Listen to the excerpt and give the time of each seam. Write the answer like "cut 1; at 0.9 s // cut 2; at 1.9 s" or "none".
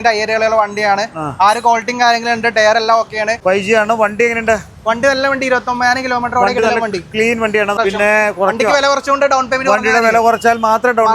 cut 1; at 3.4 s // cut 2; at 7.8 s

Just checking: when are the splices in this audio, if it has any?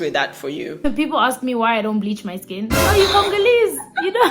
cut 1; at 0.8 s // cut 2; at 2.8 s

